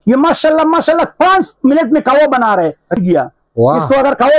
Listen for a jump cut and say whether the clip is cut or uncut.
cut